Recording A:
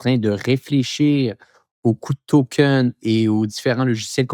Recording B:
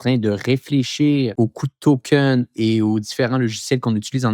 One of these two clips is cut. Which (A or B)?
B